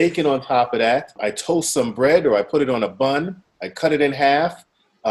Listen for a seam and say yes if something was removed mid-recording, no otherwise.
yes